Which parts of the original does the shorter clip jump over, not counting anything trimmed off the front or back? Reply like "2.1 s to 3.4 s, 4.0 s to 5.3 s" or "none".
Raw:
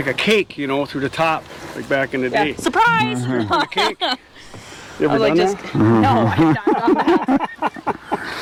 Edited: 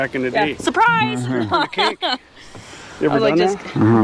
none

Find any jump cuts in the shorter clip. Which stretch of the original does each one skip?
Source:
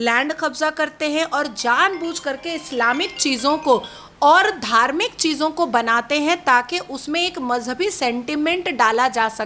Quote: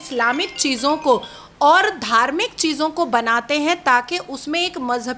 none

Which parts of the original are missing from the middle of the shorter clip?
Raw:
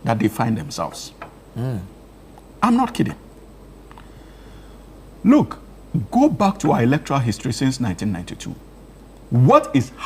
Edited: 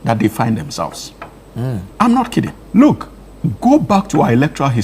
1.9 s to 2.5 s, 3.2 s to 5.1 s

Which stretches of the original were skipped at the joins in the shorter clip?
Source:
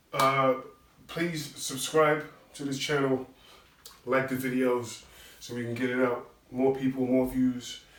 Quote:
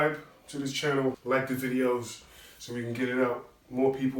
3.3 s to 4.0 s

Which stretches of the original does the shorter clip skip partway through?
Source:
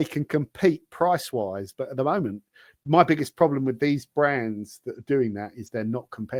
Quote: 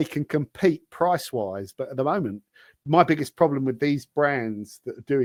none

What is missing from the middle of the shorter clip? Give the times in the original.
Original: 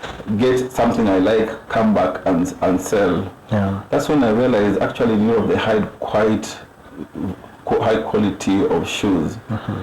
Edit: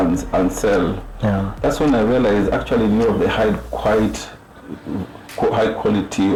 none

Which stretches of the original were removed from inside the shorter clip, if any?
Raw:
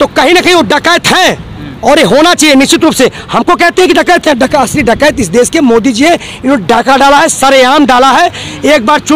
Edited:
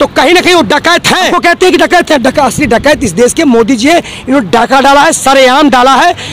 1.3 s to 3.5 s

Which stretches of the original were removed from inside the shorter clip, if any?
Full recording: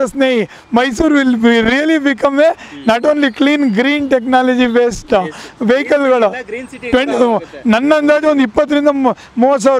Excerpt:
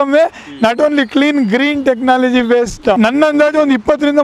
5.2 s to 7.6 s

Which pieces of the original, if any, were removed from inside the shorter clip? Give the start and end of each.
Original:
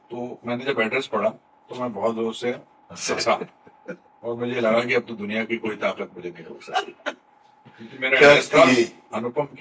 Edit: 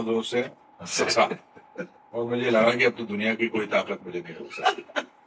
none

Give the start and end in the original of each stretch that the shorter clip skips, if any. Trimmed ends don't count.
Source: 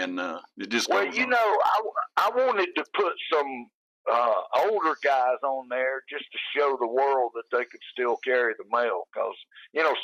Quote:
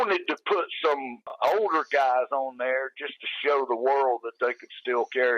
3.8 s to 4.5 s

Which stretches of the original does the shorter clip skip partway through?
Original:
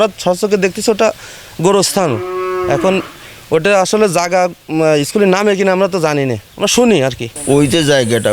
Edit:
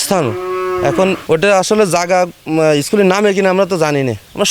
3.1 s to 3.4 s

